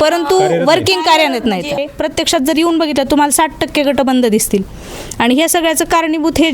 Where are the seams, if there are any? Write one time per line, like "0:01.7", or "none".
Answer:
0:01.8

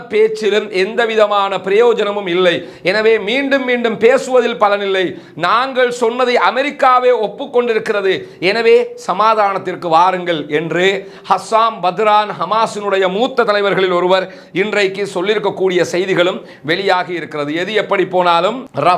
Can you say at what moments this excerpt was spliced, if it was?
none

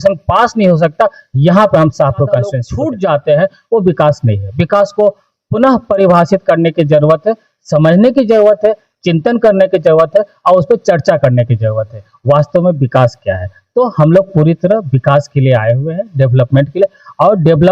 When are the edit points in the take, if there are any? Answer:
0:02.6

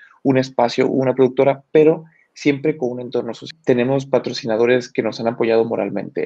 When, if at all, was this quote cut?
0:03.4

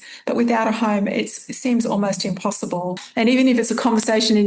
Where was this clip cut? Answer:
0:03.0

